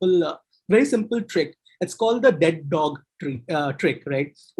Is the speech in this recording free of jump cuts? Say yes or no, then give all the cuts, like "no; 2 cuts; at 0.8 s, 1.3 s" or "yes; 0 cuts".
yes; 0 cuts